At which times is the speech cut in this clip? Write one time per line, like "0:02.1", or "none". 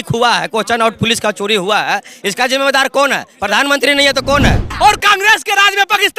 0:04.7